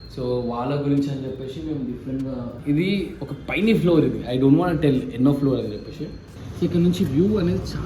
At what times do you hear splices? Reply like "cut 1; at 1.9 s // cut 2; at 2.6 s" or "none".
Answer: cut 1; at 2.5 s